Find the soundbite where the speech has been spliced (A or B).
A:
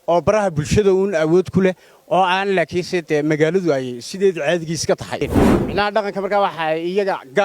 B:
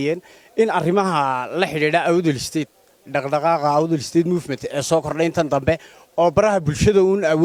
A